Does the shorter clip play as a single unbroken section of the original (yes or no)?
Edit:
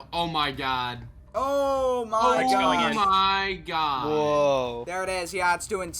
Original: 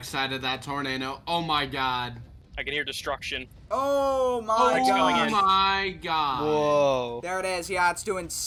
no